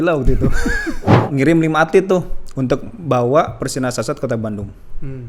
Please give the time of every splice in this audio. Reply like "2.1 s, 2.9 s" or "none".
1.3 s